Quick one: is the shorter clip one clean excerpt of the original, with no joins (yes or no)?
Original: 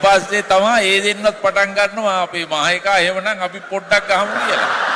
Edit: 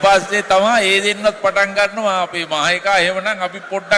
yes